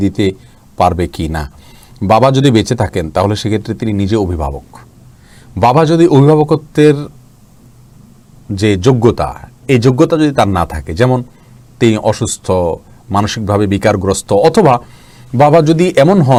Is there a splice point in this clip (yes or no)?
no